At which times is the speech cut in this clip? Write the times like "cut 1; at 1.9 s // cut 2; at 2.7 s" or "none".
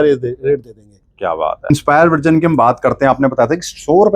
cut 1; at 1.7 s